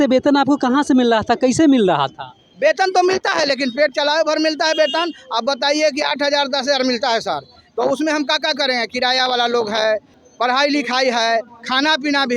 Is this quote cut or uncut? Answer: uncut